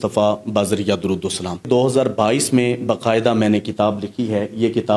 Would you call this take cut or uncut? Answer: cut